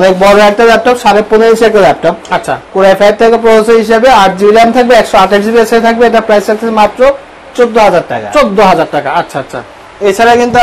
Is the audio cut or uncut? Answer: uncut